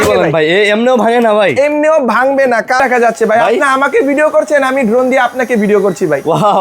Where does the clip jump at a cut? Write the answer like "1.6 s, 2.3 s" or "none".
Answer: 2.8 s